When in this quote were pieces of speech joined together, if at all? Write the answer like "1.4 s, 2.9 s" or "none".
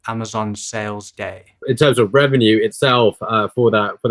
1.6 s